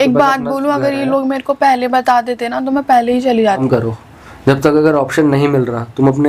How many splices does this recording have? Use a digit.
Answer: 1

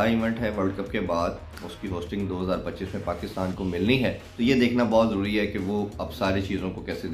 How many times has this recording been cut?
1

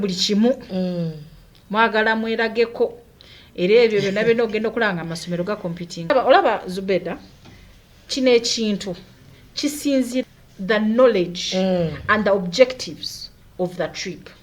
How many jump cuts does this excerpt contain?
2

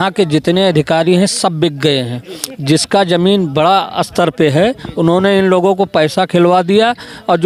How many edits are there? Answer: 0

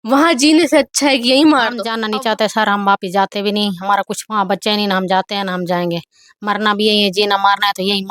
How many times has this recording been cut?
1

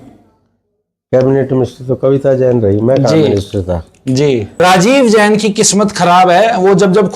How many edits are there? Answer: 1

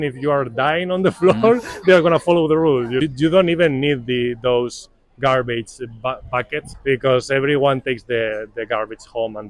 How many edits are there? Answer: 2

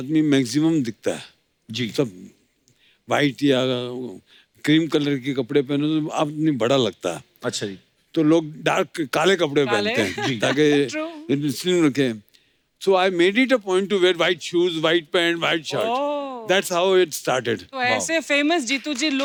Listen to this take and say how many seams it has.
0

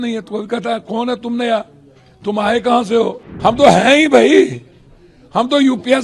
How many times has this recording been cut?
1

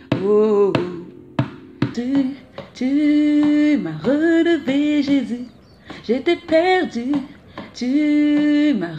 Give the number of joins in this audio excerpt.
1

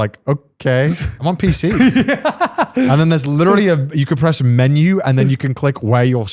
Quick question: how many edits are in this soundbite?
1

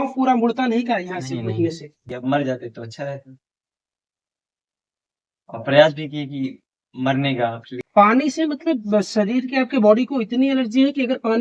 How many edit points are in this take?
2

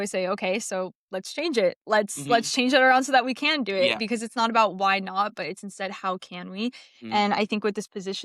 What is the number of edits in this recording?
0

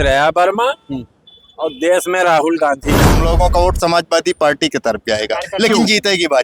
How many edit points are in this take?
1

